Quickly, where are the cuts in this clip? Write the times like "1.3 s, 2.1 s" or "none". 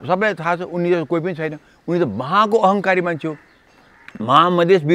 none